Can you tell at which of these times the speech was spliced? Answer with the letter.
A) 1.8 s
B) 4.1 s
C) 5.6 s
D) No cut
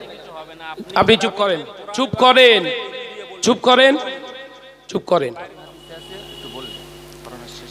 C